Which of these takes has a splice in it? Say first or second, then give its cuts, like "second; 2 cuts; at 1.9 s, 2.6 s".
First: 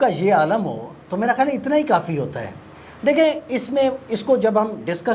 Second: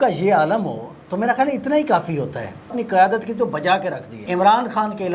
second; 2 cuts; at 2.8 s, 4.2 s